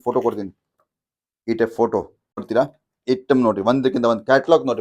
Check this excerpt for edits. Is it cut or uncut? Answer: cut